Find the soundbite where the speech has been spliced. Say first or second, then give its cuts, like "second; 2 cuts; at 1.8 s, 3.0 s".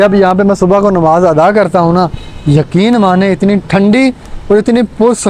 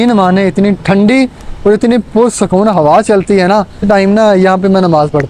second; 1 cut; at 3.8 s